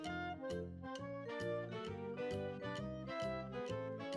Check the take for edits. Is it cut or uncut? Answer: uncut